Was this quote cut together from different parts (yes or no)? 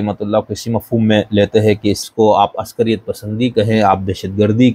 yes